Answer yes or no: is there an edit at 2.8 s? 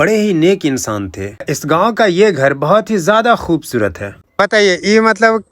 no